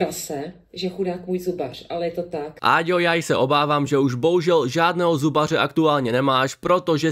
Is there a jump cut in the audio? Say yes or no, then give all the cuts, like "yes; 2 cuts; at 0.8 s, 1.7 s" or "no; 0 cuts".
yes; 1 cut; at 2.5 s